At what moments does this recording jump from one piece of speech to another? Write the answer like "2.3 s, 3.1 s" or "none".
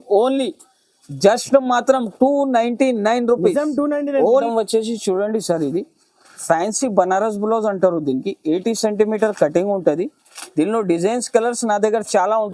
4.5 s